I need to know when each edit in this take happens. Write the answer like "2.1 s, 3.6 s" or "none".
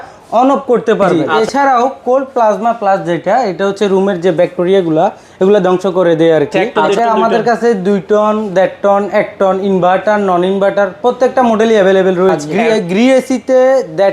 1.2 s, 6.8 s, 12.5 s